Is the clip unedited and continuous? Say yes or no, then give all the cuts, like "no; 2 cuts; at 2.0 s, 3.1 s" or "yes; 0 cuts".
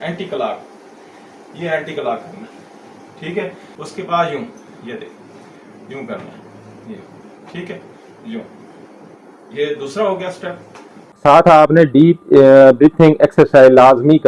no; 2 cuts; at 3.7 s, 11.1 s